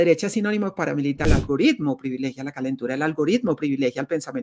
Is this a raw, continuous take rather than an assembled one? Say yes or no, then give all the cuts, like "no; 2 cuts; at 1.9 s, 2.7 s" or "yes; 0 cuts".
no; 1 cut; at 1.2 s